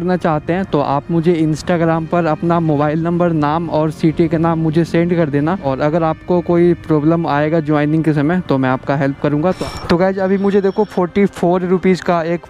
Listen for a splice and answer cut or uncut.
cut